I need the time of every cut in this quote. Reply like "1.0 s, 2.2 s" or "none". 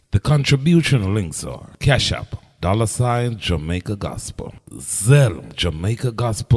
none